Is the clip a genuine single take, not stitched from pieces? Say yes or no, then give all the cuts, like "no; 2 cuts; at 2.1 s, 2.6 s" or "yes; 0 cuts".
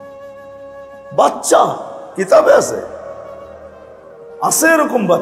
no; 1 cut; at 1.0 s